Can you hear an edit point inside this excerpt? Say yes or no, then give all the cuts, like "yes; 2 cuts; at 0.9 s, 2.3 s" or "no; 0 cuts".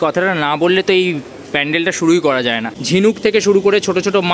yes; 1 cut; at 3.0 s